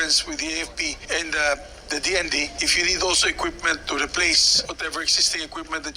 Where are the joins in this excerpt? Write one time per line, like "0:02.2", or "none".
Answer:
0:01.0
0:02.6
0:04.5